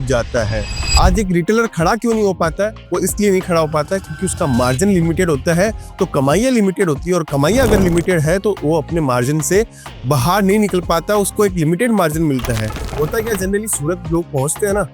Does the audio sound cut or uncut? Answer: cut